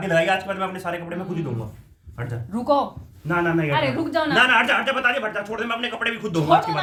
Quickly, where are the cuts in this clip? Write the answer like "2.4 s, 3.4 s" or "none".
none

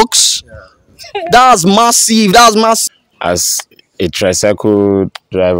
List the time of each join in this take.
2.8 s

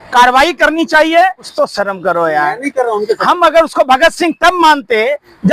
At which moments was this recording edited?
1.4 s

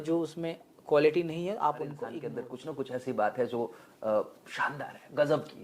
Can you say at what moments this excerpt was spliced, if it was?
2.3 s

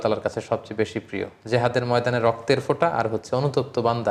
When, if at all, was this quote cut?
none

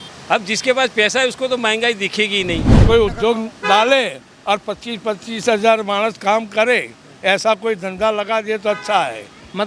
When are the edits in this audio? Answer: 2.8 s

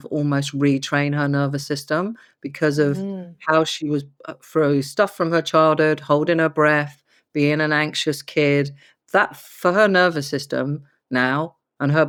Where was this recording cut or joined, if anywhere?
none

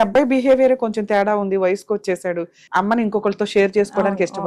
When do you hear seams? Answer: 2.6 s

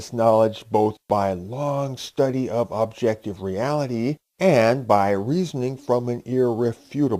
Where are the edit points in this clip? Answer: 1.3 s

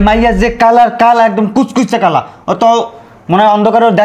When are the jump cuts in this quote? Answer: none

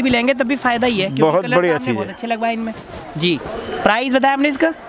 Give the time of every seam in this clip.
none

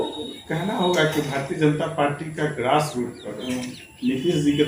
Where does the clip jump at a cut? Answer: 3.4 s

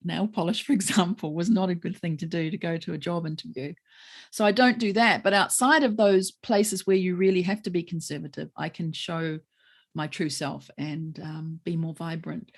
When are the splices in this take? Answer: none

